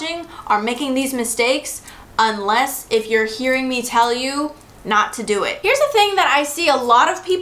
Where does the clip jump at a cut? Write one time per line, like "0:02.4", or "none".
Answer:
0:05.6